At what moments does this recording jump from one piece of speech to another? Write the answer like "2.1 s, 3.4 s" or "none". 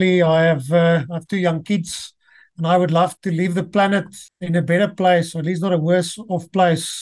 3.2 s, 4.2 s